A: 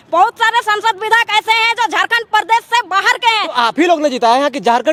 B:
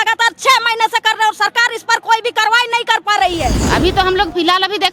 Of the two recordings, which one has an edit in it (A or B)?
B